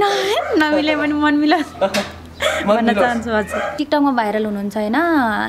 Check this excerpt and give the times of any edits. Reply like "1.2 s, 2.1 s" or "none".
3.8 s